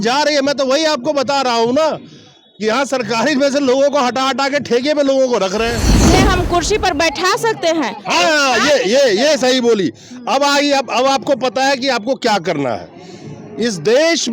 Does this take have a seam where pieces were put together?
yes; 1 cut; at 6.1 s

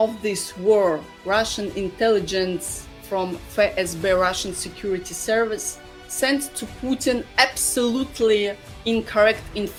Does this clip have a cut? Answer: no; 0 cuts

